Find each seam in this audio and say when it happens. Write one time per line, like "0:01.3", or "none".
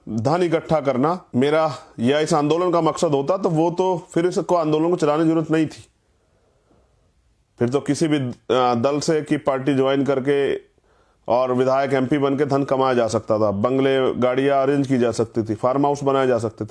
0:01.2